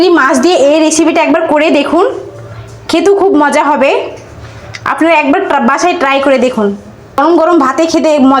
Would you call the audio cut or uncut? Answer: cut